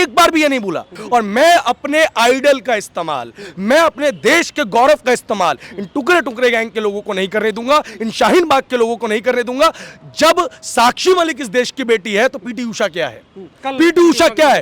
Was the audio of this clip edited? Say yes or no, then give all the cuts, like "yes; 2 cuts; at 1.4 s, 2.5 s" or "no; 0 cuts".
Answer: yes; 1 cut; at 0.9 s